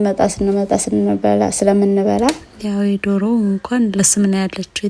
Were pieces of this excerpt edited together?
yes; 1 cut; at 2.5 s

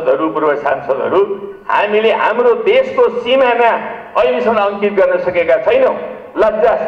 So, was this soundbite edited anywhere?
no; 0 cuts

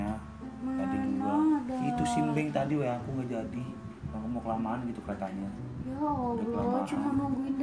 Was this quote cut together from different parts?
no; 0 cuts

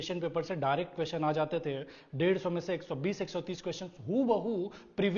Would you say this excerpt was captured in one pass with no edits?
yes; 0 cuts

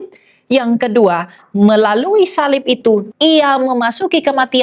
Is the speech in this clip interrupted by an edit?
yes; 1 cut; at 3.1 s

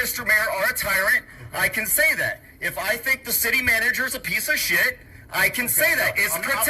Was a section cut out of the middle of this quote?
no; 0 cuts

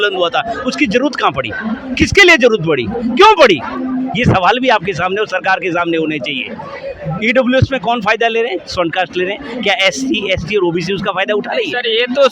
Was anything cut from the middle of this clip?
no; 0 cuts

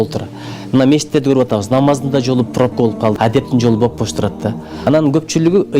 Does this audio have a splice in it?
yes; 2 cuts; at 3.2 s, 4.7 s

